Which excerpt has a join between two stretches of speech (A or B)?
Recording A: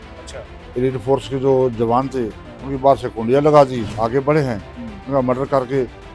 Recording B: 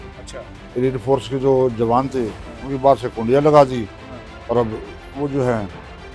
A